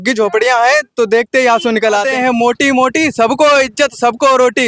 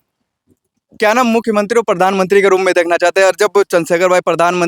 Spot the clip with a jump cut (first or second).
first